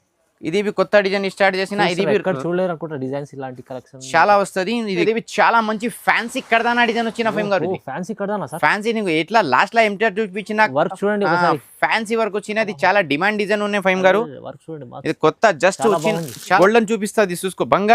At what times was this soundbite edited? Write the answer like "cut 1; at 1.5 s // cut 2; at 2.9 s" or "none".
cut 1; at 5.0 s // cut 2; at 16.6 s